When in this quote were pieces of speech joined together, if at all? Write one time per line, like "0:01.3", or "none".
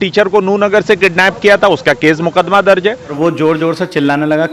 0:03.1